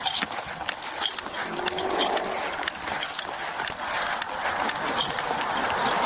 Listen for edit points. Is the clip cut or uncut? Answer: uncut